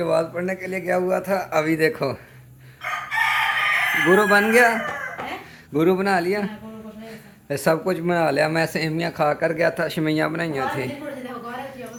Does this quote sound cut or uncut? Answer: uncut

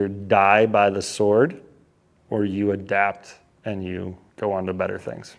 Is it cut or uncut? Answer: cut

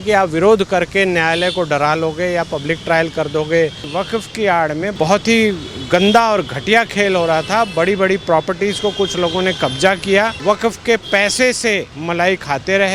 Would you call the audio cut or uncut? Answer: cut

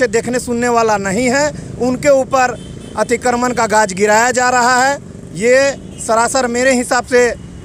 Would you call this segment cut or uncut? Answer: uncut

